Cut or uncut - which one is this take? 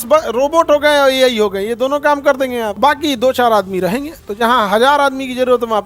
uncut